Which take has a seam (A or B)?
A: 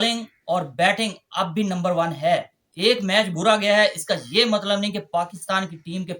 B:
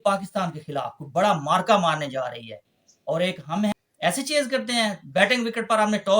B